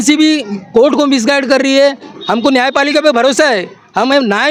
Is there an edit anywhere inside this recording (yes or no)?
no